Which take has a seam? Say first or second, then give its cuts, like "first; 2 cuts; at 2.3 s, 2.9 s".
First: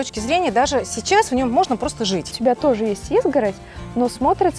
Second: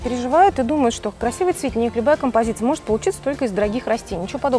first; 1 cut; at 2.3 s